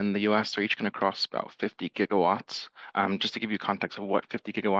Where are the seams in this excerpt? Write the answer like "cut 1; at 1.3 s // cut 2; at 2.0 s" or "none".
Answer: none